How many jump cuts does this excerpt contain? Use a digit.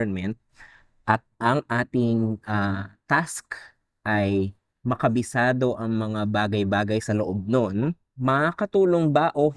2